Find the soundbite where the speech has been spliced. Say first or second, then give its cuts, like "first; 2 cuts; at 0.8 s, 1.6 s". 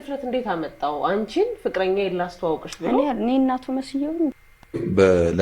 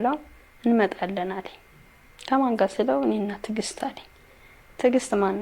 first; 1 cut; at 4.5 s